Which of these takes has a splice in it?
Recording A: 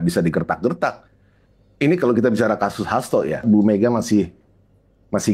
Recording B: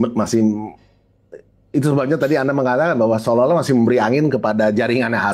A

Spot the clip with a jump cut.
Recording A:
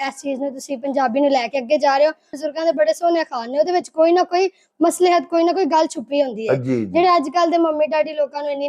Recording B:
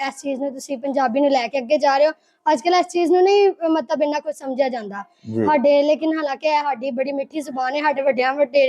A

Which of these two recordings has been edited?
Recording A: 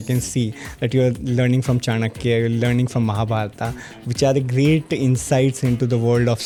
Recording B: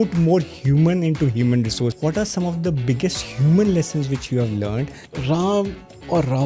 B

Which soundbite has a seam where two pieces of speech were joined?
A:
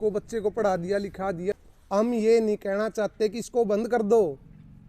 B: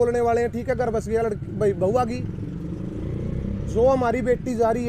A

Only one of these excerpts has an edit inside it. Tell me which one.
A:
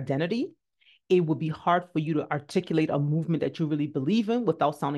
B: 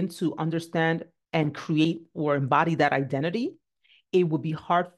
B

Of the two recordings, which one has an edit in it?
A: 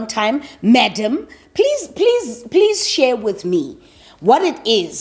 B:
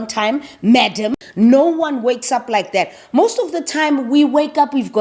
B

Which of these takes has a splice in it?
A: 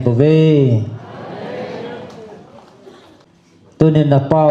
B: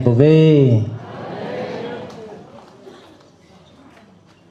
A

